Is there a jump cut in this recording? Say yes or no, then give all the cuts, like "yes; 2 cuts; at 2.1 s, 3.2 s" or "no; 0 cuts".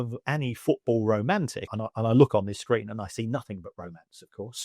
yes; 1 cut; at 1.7 s